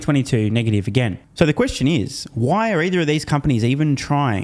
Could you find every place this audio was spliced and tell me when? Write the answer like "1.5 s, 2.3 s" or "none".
1.2 s